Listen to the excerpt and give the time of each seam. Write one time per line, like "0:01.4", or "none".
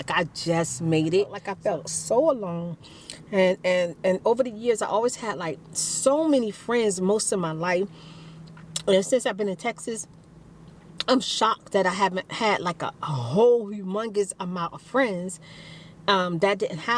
0:01.4